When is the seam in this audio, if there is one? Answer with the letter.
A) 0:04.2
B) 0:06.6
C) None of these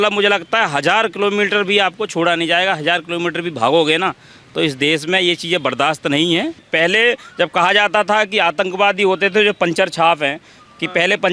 B